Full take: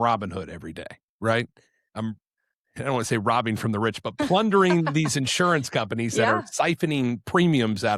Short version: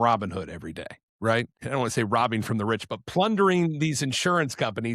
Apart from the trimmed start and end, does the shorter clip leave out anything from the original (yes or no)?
yes